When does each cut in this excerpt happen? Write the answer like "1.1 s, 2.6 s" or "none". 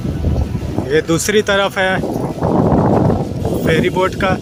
none